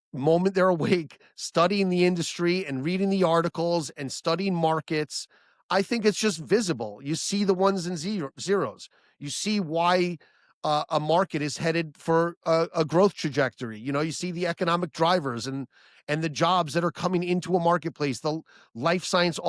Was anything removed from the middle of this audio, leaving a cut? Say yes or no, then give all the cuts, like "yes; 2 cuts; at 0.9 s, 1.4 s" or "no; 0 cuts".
no; 0 cuts